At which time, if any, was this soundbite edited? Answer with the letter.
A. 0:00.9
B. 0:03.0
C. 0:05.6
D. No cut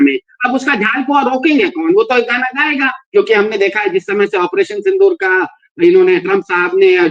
B